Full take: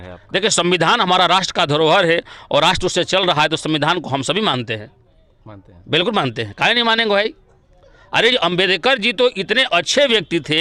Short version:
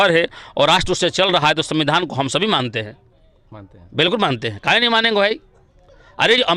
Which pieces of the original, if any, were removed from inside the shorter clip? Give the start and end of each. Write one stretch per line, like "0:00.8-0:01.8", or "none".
none